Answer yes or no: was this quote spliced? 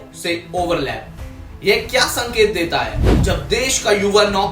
yes